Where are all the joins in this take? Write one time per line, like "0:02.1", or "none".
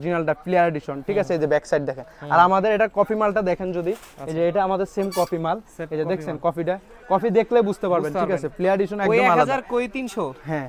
none